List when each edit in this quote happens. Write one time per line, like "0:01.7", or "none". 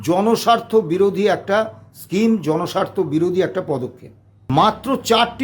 0:04.4